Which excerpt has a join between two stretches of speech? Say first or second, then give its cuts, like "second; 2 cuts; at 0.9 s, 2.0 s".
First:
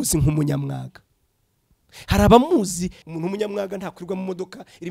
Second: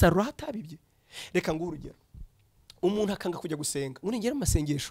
first; 1 cut; at 3.0 s